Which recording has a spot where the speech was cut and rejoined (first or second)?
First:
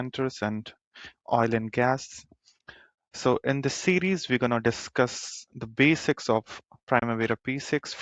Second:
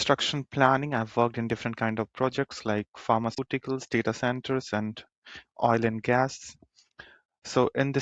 second